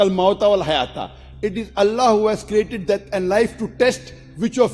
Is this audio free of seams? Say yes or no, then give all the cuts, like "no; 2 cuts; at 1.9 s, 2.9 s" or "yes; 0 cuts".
yes; 0 cuts